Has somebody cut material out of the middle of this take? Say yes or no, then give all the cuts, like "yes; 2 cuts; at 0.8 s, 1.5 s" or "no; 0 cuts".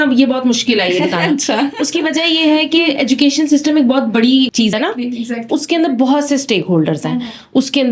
no; 0 cuts